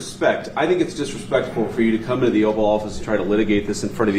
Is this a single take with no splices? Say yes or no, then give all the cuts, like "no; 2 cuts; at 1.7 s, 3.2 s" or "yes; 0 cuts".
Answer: yes; 0 cuts